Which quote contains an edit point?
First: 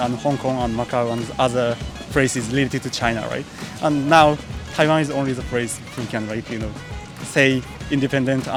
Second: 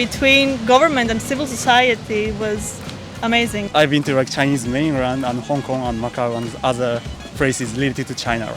second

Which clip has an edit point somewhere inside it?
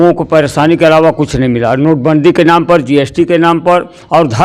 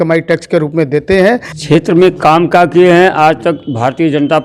second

